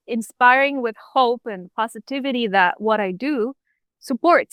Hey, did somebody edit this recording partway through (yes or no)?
no